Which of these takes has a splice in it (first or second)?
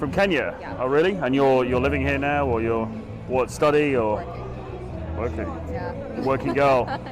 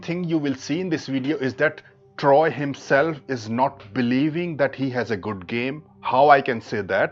first